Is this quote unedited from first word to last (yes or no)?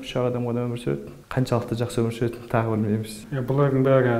no